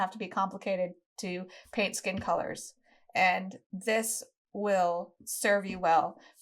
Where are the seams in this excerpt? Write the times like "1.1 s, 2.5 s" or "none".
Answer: none